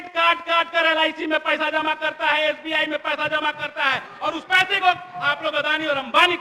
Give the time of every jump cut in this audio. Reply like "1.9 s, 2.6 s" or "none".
none